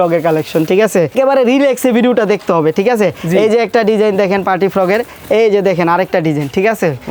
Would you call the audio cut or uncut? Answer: uncut